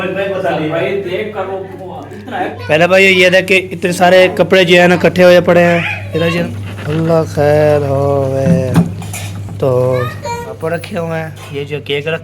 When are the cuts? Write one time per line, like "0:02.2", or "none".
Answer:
0:02.6
0:06.4
0:10.5